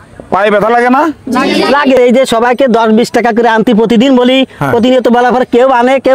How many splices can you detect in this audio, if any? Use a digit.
1